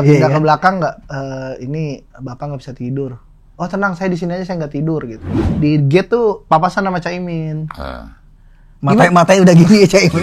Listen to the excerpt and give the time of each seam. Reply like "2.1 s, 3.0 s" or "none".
5.4 s